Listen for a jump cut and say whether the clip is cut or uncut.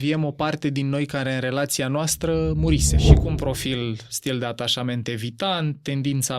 cut